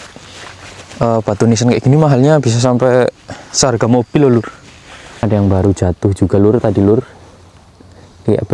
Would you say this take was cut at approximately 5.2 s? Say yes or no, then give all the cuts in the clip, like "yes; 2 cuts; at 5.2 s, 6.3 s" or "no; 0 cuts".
yes; 1 cut; at 5.2 s